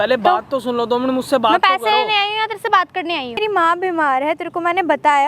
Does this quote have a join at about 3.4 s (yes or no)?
yes